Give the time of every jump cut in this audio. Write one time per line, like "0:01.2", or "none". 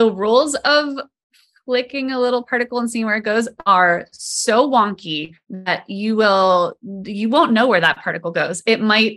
none